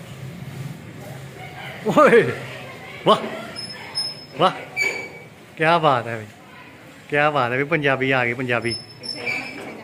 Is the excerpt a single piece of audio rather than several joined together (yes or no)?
yes